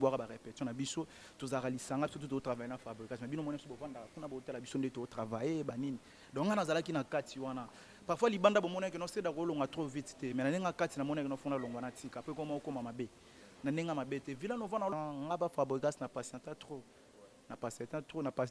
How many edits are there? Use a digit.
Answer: 1